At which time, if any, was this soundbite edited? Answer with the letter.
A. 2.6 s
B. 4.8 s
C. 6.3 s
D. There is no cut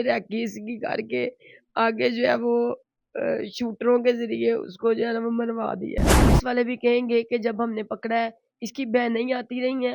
C